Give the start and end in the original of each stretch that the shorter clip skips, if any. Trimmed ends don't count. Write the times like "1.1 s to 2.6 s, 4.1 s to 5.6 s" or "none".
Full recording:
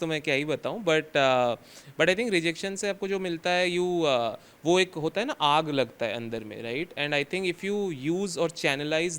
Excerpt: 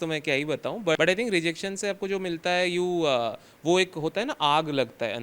1.0 s to 2.0 s